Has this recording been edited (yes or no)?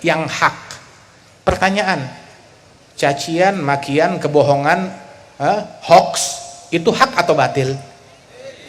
no